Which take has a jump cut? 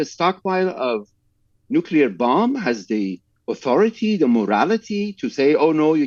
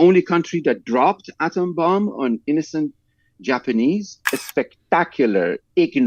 second; 1 cut; at 4.4 s

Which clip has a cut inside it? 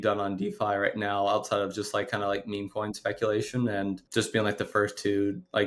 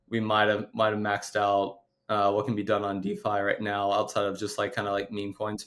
first; 1 cut; at 4.0 s

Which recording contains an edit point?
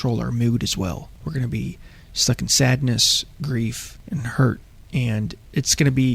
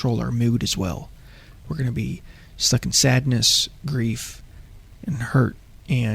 first; 2 cuts; at 1.1 s, 3.9 s

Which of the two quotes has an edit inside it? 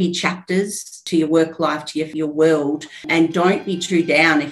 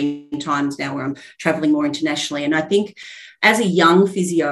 first; 3 cuts; at 1.0 s, 2.1 s, 3.1 s

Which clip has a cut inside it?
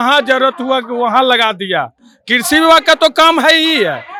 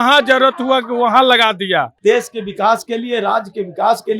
second; 1 cut; at 1.9 s

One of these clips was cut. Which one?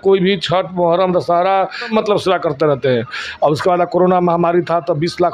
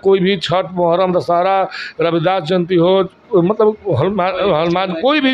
first; 1 cut; at 1.9 s

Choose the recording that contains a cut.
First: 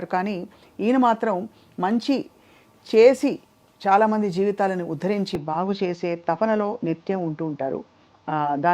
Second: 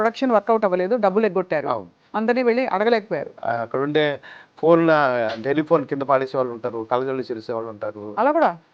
second; 1 cut; at 3.3 s

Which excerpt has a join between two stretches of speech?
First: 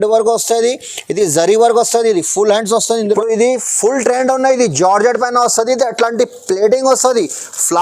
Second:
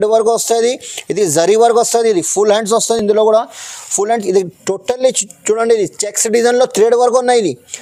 first; 1 cut; at 3.0 s

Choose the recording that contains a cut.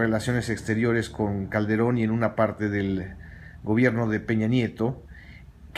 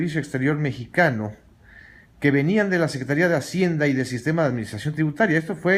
first; 1 cut; at 1.5 s

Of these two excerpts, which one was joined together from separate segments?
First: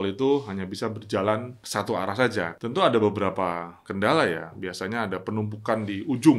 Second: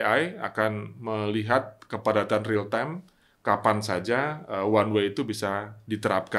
first; 3 cuts; at 1.6 s, 2.5 s, 3.8 s

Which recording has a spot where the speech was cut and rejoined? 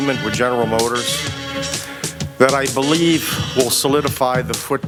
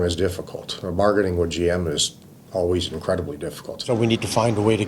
second; 1 cut; at 3.8 s

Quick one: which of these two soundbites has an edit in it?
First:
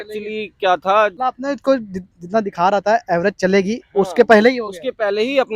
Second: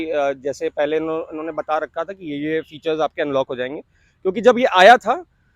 first; 1 cut; at 1.1 s

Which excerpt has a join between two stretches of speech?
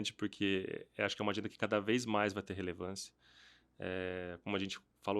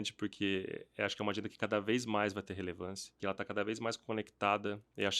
second; 1 cut; at 3.2 s

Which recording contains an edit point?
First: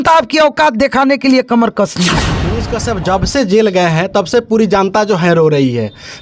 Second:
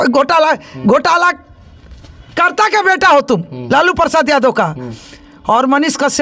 first; 1 cut; at 2.3 s

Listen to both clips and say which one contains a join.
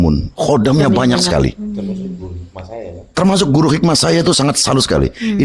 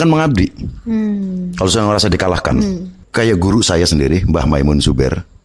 second; 1 cut; at 3.0 s

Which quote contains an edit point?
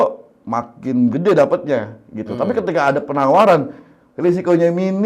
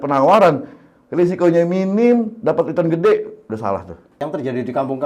second; 1 cut; at 4.0 s

